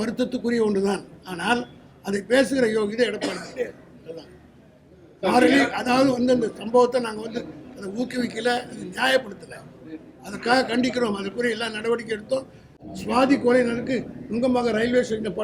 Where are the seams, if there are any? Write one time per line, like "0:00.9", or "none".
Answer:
0:12.8